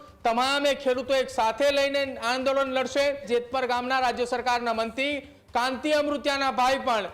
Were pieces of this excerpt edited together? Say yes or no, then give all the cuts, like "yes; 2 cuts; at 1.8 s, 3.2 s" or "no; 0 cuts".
yes; 1 cut; at 3.3 s